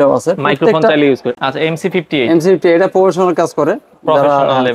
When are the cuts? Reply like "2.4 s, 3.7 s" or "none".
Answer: 1.3 s

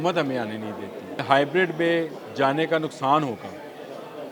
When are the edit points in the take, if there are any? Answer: 1.2 s

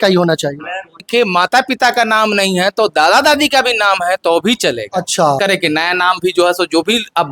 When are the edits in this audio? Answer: 1.0 s, 5.4 s

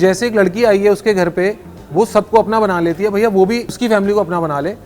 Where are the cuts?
3.8 s

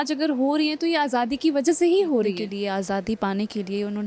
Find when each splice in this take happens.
2.5 s

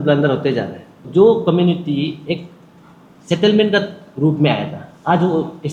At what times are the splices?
1.0 s

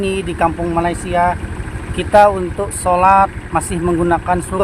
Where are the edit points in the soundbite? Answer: none

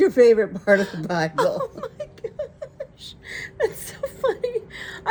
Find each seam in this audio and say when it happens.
none

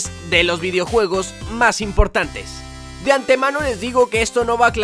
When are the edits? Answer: 2.5 s

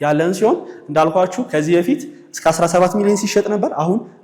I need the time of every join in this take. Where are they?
none

